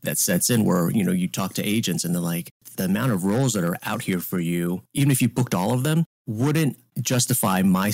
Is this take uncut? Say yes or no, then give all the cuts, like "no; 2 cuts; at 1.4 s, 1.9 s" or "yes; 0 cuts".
no; 5 cuts; at 2.7 s, 3.8 s, 4.9 s, 6.2 s, 6.9 s